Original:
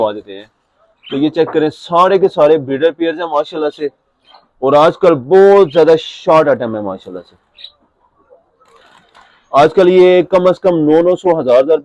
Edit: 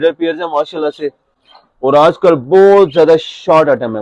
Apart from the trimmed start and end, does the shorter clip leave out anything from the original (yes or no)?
no